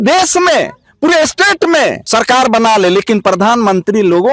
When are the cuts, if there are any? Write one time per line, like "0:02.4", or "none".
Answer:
0:02.0